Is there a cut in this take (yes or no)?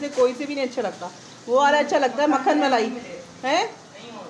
no